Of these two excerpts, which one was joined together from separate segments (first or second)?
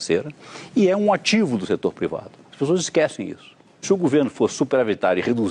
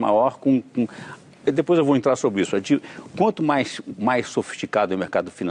first